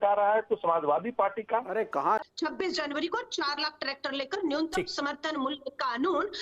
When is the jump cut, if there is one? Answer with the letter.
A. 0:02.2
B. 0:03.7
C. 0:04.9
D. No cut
A